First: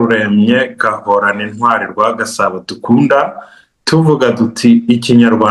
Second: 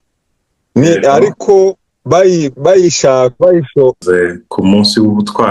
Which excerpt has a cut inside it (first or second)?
second